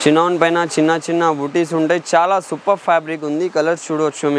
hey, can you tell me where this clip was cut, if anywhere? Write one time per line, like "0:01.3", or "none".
none